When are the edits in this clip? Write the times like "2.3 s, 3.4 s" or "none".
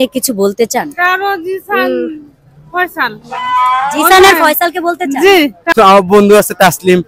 5.6 s

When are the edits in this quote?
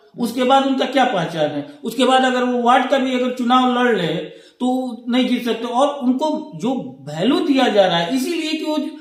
none

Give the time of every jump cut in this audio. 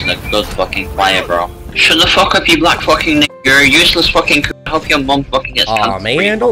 1.7 s

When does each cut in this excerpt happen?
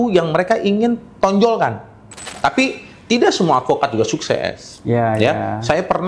2.4 s

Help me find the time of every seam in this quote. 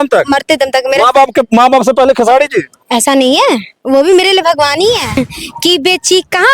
5.2 s

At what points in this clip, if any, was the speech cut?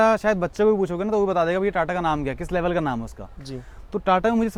none

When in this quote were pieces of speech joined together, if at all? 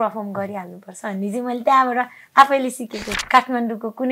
3.0 s

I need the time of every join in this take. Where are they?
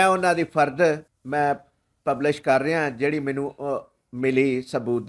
1.1 s

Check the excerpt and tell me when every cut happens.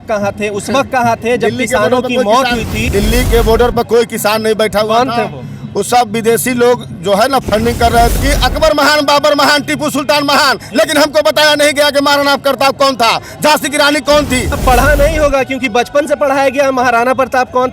2.8 s, 8.1 s, 14.5 s

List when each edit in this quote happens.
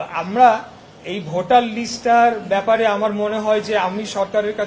none

